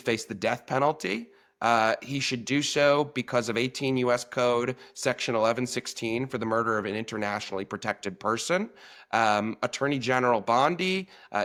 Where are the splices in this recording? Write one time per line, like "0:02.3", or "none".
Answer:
none